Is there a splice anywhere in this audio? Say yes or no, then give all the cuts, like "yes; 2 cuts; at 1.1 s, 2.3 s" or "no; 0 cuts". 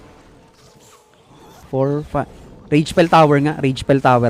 yes; 1 cut; at 1.6 s